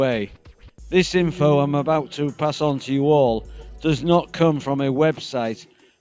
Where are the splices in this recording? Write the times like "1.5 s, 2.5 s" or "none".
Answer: 1.7 s